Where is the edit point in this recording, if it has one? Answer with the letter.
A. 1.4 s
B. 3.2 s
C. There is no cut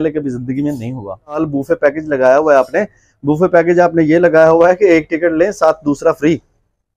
A